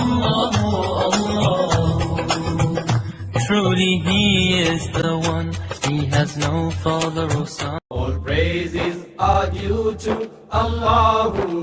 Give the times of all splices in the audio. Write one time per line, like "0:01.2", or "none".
0:07.8